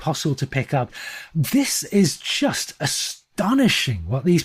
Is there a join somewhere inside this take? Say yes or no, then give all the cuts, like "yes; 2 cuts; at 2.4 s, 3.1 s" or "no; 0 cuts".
yes; 1 cut; at 1.0 s